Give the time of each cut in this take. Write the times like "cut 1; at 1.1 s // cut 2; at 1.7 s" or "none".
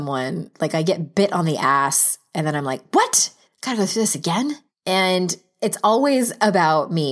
cut 1; at 4.7 s